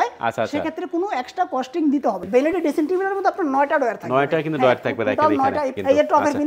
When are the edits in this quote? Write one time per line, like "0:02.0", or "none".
0:02.3
0:05.7